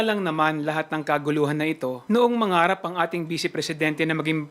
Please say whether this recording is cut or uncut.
cut